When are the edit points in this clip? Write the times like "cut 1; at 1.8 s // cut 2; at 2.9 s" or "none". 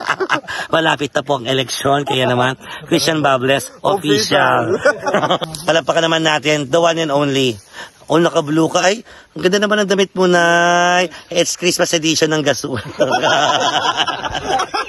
cut 1; at 5.4 s